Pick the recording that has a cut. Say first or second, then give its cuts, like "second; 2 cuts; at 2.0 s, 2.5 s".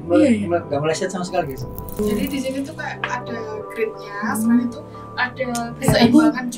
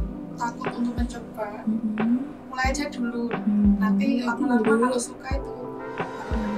first; 1 cut; at 2.0 s